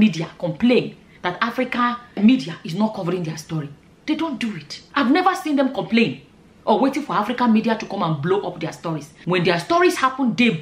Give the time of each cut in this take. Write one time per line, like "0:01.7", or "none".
none